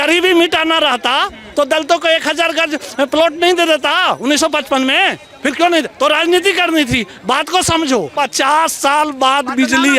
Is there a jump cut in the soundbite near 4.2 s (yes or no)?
no